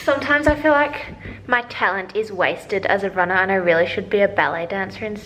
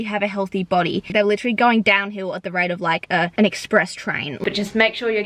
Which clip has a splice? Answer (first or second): second